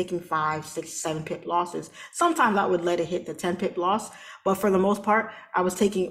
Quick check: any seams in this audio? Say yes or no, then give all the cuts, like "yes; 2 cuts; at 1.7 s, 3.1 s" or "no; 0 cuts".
no; 0 cuts